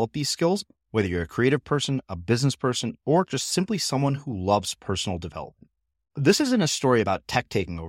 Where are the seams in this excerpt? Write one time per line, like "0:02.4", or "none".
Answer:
none